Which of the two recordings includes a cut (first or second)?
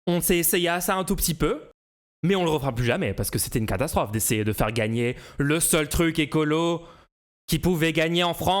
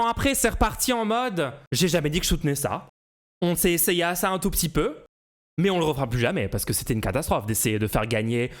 second